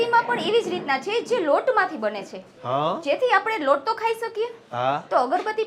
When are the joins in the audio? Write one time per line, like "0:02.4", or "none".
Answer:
none